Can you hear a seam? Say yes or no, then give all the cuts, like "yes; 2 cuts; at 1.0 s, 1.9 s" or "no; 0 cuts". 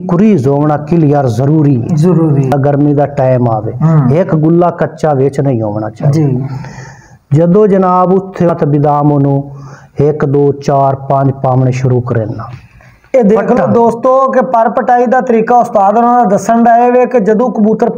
yes; 2 cuts; at 2.5 s, 8.5 s